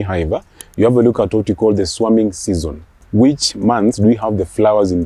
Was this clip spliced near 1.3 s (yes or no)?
no